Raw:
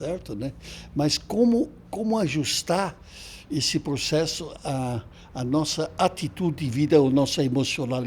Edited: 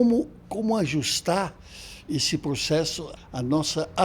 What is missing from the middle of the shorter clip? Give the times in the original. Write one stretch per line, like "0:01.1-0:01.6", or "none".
0:04.5-0:05.1